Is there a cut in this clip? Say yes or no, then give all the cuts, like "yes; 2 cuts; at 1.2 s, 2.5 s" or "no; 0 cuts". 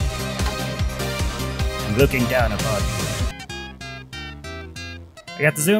yes; 1 cut; at 3.3 s